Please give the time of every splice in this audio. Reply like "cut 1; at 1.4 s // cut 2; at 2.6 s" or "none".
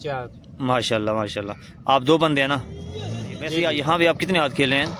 cut 1; at 3.6 s